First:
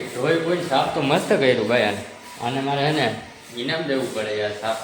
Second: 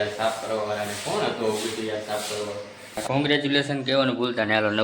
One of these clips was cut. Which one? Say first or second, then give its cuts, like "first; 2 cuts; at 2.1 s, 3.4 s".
second; 2 cuts; at 1.3 s, 3.0 s